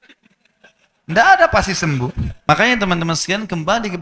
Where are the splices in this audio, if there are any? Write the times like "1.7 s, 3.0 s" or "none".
2.5 s